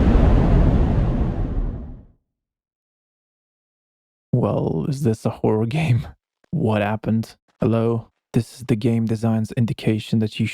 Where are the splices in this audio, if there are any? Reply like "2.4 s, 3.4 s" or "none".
8.2 s